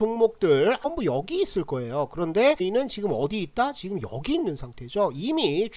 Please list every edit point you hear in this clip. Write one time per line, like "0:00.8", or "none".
0:00.9
0:02.6